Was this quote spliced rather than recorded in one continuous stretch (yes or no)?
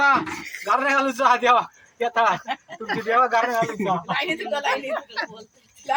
no